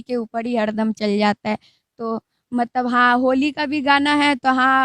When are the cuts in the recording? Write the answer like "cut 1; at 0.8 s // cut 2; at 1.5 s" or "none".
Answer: none